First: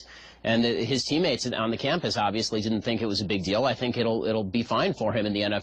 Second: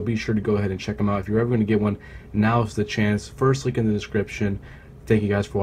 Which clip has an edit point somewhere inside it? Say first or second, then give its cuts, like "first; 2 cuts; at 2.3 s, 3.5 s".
first; 1 cut; at 1.7 s